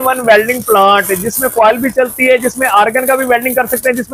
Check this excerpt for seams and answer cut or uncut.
uncut